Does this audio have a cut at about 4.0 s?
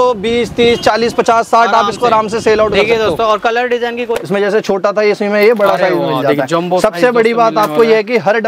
yes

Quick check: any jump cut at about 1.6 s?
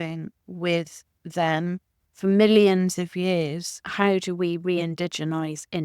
no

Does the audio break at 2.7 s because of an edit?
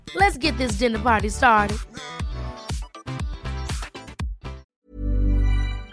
no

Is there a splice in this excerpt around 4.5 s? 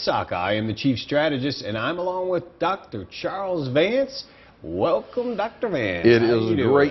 yes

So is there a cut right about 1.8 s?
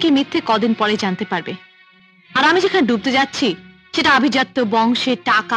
no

